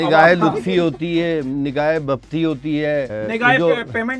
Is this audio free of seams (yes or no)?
no